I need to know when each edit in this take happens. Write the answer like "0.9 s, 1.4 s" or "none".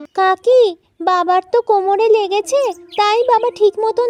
none